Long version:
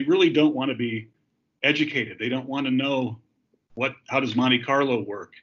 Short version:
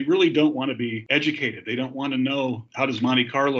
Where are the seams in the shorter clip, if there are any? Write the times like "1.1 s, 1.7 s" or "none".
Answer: 1.0 s, 2.7 s